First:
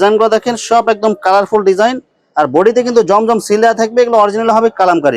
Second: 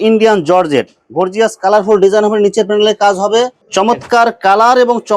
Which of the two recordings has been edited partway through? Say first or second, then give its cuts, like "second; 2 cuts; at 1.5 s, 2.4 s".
second; 1 cut; at 3.6 s